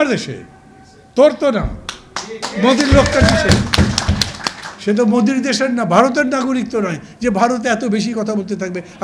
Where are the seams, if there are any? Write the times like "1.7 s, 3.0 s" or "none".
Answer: none